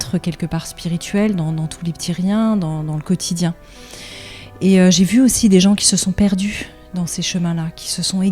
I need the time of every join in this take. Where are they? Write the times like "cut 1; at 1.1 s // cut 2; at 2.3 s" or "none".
none